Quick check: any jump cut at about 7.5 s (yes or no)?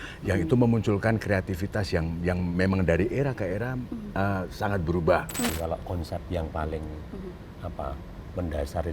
no